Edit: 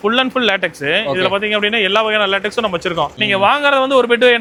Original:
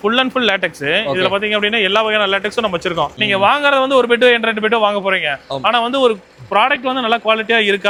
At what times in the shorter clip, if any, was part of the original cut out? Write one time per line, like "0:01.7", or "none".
none